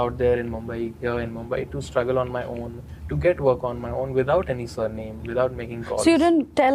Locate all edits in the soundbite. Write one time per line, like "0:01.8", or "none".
none